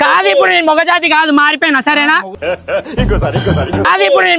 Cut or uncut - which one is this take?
uncut